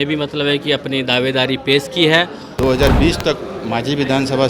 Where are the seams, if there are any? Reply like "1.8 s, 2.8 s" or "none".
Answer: 2.6 s